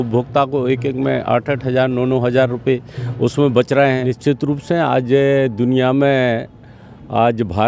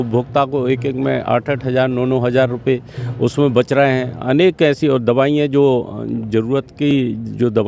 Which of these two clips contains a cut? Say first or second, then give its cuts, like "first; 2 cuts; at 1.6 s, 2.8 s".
first; 1 cut; at 4.1 s